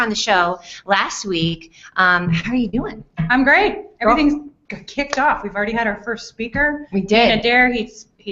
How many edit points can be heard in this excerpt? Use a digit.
1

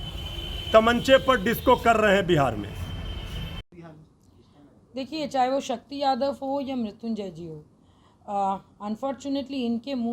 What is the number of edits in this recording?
1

